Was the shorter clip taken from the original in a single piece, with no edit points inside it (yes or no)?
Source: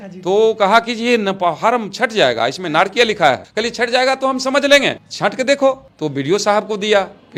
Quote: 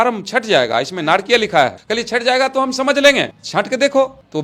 yes